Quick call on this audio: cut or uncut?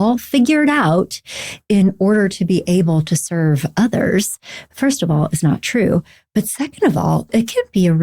uncut